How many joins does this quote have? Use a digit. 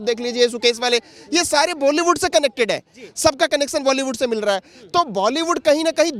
0